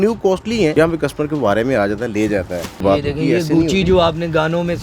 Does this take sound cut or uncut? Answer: cut